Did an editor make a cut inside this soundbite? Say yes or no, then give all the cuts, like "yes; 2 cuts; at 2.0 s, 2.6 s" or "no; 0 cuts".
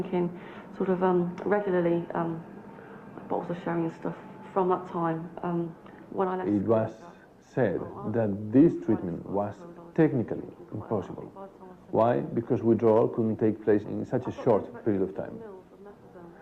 yes; 1 cut; at 5.6 s